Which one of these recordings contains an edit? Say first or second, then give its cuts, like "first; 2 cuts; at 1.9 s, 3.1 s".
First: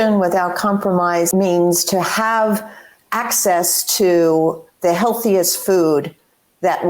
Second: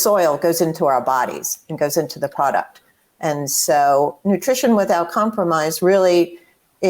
first; 1 cut; at 1.3 s